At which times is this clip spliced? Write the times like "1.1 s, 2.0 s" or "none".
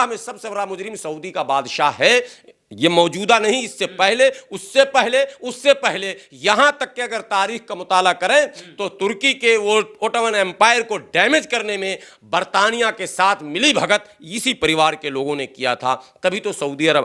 none